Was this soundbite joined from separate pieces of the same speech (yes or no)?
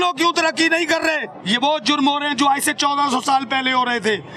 yes